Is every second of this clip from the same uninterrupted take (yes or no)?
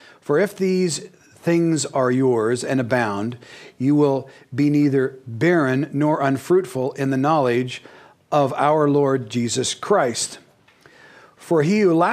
no